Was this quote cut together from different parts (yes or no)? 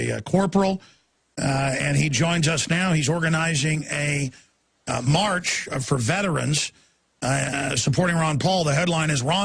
yes